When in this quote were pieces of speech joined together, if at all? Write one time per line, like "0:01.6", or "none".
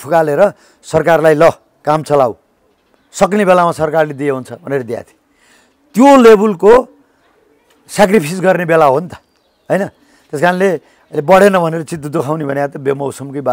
none